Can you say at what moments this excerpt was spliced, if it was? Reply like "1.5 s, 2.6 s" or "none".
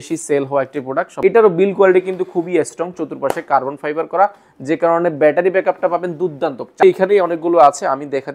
1.1 s, 6.8 s